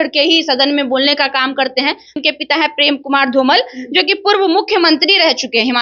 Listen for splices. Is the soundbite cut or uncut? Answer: cut